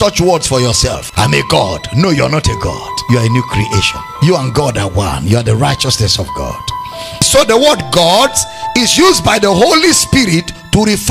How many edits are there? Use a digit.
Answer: 3